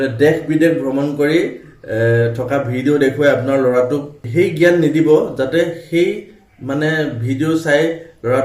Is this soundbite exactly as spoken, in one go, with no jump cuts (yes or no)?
yes